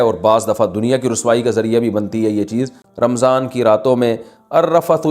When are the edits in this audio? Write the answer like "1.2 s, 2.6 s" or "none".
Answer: 2.8 s